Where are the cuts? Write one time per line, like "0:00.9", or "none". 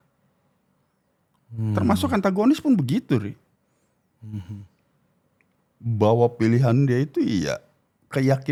none